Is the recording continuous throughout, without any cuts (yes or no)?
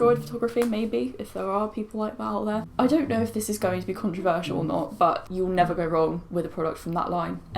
no